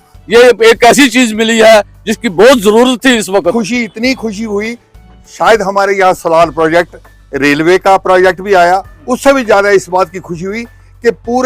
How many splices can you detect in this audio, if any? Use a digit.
1